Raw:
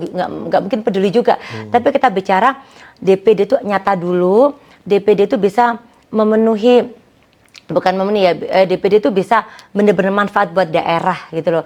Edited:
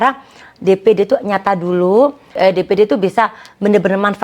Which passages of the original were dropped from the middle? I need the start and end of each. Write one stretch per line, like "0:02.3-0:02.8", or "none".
0:04.7-0:08.4